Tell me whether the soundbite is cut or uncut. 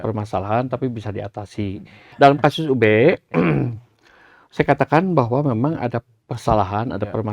cut